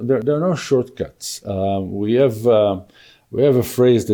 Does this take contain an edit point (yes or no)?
no